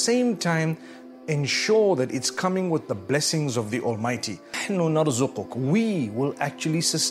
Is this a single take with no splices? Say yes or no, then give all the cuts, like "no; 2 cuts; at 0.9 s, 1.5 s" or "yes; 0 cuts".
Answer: no; 1 cut; at 4.6 s